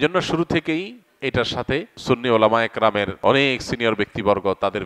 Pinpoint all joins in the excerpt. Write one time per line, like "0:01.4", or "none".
0:01.9
0:03.1